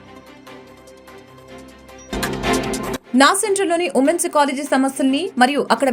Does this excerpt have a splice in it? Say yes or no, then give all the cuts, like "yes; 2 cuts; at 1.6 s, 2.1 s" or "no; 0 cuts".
yes; 2 cuts; at 2.1 s, 3.0 s